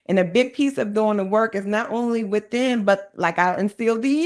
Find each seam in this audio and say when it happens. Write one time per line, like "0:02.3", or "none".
none